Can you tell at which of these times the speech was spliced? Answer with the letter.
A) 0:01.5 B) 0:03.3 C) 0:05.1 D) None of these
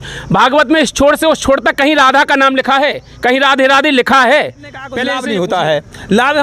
C